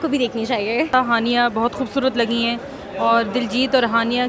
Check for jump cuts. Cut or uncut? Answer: cut